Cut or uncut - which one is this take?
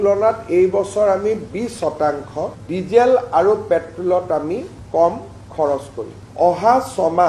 cut